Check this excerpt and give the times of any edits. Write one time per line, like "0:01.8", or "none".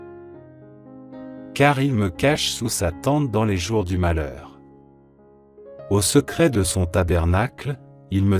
0:04.4
0:05.8